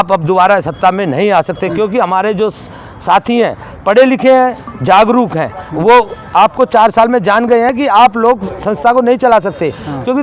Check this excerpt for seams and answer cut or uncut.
uncut